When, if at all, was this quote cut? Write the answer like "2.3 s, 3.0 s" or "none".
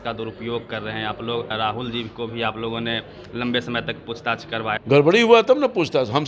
1.5 s, 4.8 s